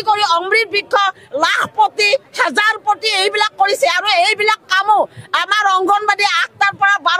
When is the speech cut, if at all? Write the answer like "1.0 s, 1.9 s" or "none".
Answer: none